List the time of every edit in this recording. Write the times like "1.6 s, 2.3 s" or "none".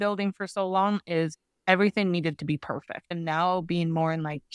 3.1 s